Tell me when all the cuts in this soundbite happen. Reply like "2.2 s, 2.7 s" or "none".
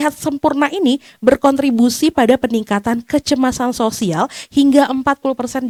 none